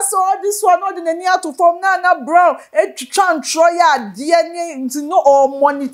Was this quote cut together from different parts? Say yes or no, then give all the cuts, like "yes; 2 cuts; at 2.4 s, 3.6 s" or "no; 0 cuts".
no; 0 cuts